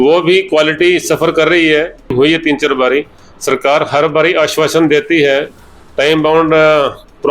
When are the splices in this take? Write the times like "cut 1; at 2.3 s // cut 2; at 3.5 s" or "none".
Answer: cut 1; at 2.1 s